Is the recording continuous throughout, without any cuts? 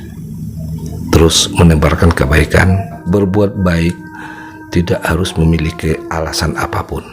no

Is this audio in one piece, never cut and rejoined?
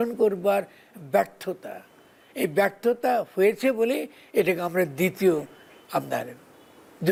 yes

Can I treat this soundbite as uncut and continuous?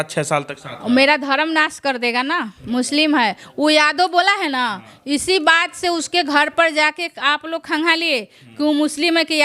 yes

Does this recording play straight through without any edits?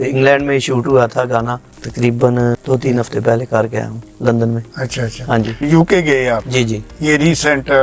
yes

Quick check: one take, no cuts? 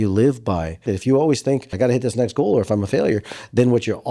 no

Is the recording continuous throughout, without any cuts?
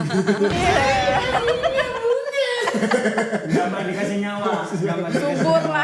yes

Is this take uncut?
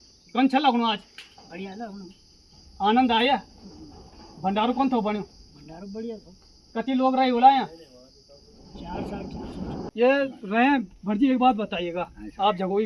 no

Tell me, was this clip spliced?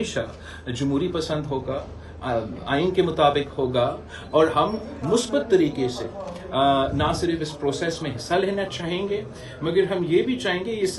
no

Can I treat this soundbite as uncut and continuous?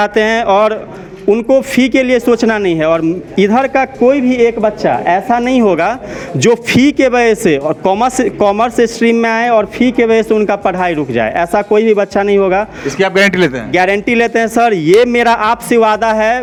yes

